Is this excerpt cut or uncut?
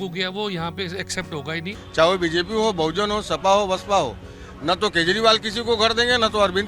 cut